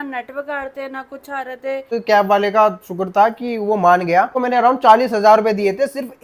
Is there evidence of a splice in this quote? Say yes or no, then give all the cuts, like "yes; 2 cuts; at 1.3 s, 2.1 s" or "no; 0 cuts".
yes; 2 cuts; at 1.9 s, 4.3 s